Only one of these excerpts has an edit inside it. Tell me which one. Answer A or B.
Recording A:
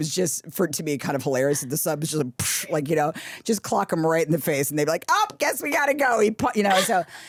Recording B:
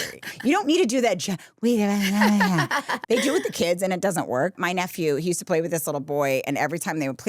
B